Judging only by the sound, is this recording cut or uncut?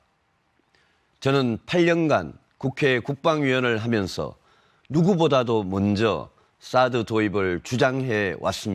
cut